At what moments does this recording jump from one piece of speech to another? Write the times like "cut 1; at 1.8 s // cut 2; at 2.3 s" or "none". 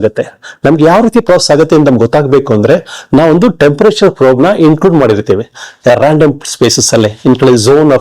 none

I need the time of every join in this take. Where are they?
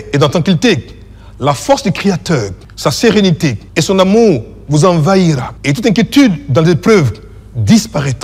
cut 1; at 2.6 s // cut 2; at 3.6 s // cut 3; at 5.5 s

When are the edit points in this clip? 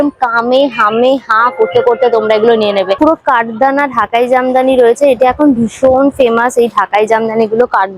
cut 1; at 3.0 s

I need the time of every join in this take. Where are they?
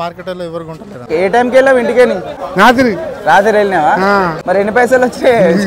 cut 1; at 1.0 s // cut 2; at 2.5 s // cut 3; at 4.4 s

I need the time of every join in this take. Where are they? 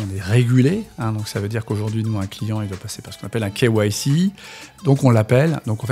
none

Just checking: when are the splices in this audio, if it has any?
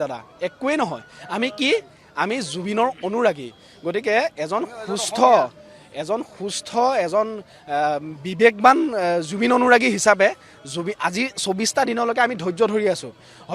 none

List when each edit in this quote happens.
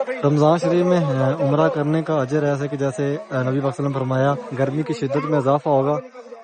cut 1; at 4.5 s

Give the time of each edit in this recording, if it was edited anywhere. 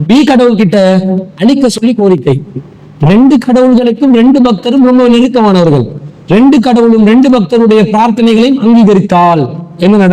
none

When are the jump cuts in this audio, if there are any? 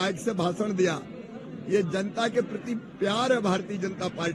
none

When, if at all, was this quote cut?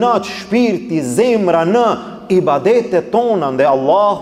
none

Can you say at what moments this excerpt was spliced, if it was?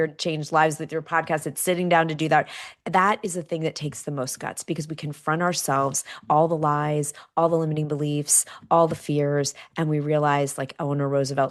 none

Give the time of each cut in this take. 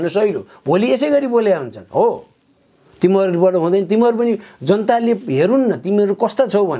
none

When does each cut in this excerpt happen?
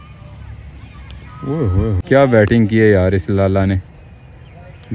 cut 1; at 2.0 s

